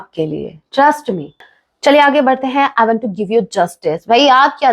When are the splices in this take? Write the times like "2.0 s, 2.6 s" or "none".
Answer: 1.4 s

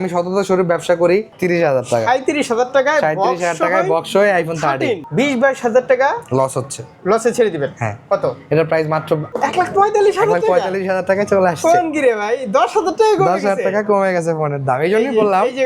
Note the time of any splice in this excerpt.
1.3 s, 5.0 s, 9.3 s

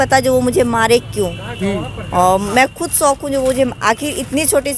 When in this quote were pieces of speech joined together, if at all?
none

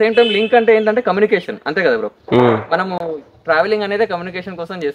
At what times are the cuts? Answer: none

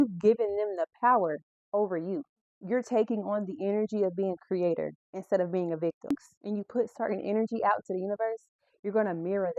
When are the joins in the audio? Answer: 2.4 s, 6.2 s

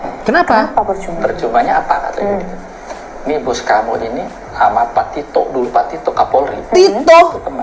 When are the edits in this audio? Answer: none

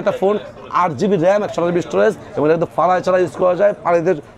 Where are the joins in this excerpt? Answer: none

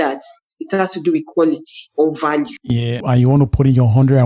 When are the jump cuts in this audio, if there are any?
3.0 s

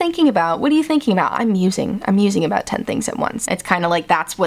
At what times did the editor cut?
3.4 s

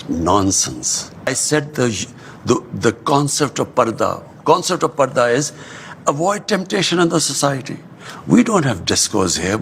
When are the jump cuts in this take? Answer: 1.3 s

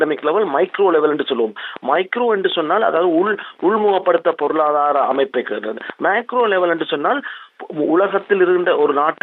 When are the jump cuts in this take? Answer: none

